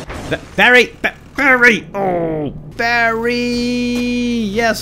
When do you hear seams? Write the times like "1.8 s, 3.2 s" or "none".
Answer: 2.7 s